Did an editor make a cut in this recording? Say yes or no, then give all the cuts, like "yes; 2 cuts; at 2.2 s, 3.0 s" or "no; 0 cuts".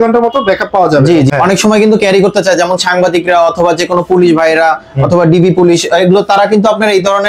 yes; 1 cut; at 1.3 s